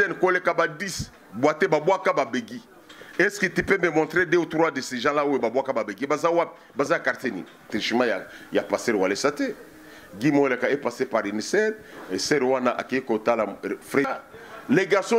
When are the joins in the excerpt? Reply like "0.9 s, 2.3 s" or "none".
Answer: 7.6 s, 14.1 s

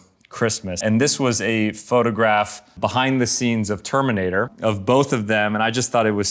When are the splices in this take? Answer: none

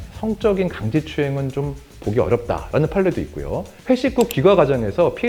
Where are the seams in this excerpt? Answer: none

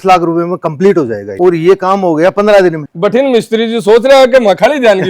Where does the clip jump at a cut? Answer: 1.3 s, 2.9 s

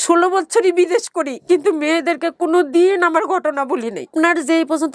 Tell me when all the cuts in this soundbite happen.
none

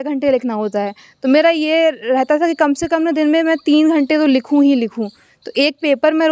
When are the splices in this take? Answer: none

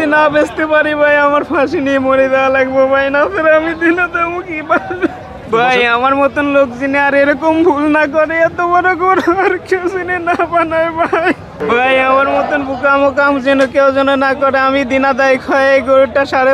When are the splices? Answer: 5.5 s, 11.6 s

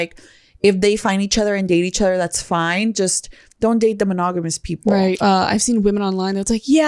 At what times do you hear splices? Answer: 5.2 s

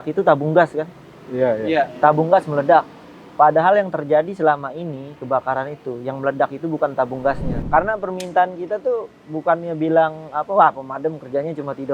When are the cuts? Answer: 7.5 s

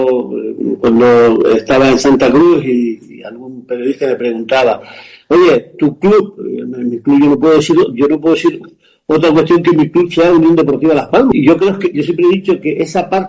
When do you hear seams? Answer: 11.3 s

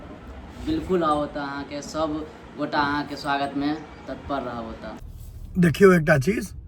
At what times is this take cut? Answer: 5.0 s

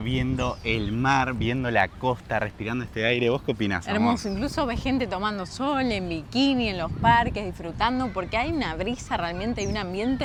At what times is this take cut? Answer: none

